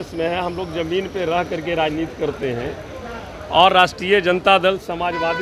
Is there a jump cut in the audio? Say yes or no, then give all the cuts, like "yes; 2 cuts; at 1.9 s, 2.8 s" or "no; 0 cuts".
no; 0 cuts